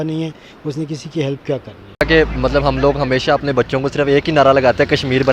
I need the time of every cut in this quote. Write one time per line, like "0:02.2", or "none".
0:02.0